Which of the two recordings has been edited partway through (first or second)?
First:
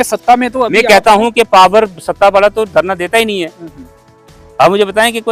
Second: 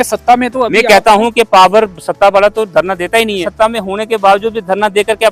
second